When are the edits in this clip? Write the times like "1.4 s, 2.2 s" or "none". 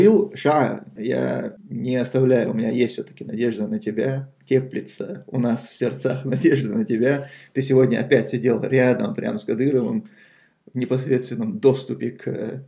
1.1 s